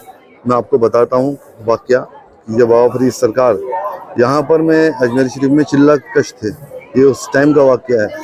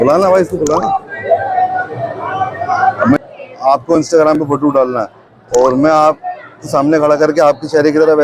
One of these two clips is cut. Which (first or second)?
second